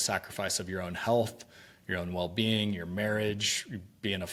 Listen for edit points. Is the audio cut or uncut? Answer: uncut